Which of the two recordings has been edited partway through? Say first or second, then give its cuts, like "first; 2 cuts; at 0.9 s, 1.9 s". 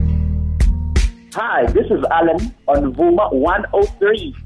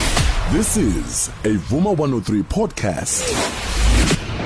first; 1 cut; at 1.4 s